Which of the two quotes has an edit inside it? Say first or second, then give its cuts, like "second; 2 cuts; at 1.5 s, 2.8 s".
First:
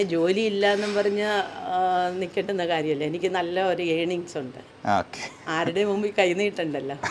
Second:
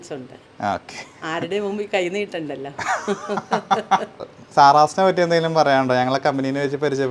second; 1 cut; at 4.1 s